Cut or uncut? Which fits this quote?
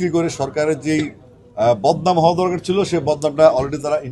uncut